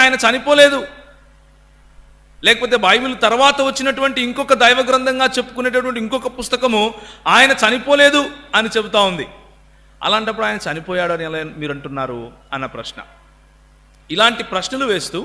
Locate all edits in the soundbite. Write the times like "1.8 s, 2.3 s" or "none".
none